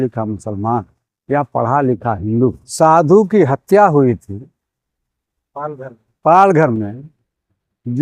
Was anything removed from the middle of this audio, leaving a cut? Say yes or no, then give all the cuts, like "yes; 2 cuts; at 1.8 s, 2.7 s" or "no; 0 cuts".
yes; 1 cut; at 2.6 s